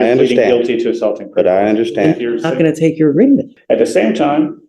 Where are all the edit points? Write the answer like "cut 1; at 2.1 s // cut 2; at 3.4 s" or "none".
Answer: cut 1; at 3.5 s